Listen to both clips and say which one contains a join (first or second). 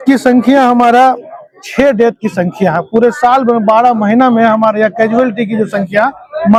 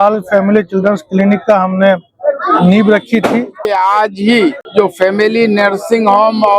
second